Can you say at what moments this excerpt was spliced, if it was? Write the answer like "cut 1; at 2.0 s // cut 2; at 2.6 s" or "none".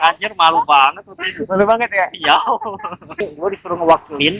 cut 1; at 3.2 s